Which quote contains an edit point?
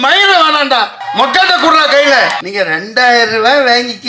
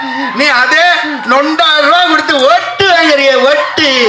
first; 2 cuts; at 1.0 s, 2.4 s

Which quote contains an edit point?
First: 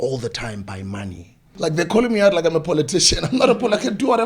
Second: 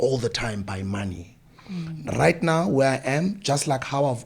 first; 1 cut; at 1.5 s

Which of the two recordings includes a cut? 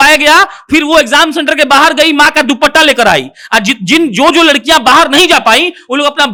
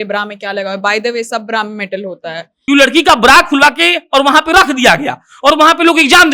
second; 1 cut; at 2.5 s

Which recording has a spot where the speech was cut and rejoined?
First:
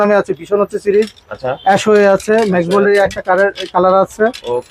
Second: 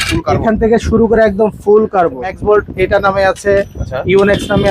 second; 1 cut; at 2.3 s

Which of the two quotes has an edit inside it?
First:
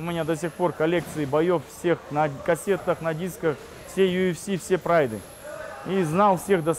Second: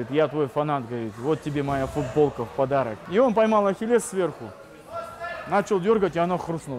second; 1 cut; at 3.0 s

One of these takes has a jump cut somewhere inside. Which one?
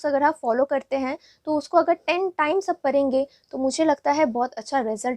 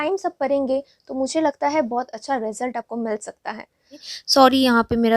second; 1 cut; at 4.1 s

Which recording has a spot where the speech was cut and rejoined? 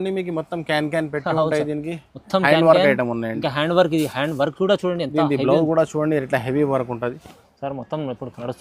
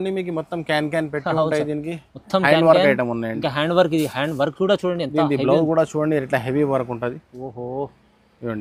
first; 1 cut; at 7.3 s

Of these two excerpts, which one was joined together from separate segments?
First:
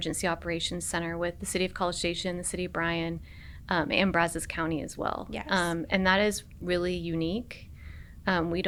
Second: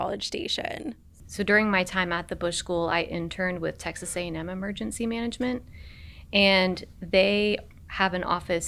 second; 2 cuts; at 1.1 s, 7.8 s

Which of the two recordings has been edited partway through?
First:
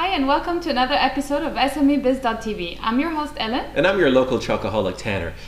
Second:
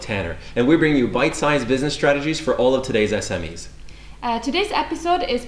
second; 1 cut; at 1.5 s

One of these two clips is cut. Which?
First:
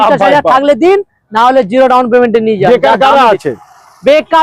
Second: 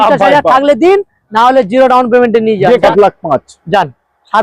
second; 1 cut; at 2.8 s

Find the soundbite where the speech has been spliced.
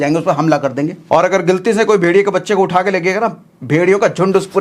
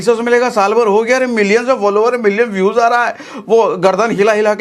first; 1 cut; at 1.0 s

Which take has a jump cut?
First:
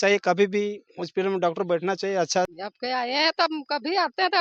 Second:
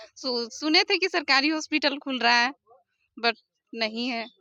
first; 1 cut; at 2.5 s

